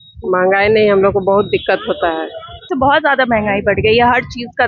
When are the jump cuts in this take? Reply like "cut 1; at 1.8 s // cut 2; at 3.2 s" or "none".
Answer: cut 1; at 2.7 s